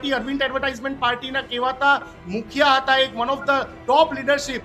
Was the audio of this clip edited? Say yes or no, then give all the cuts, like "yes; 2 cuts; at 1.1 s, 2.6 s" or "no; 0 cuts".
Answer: no; 0 cuts